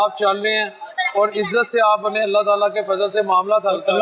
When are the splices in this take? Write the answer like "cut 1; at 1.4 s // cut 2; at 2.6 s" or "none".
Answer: none